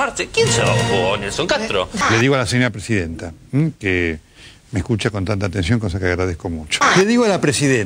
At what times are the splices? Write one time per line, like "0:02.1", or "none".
none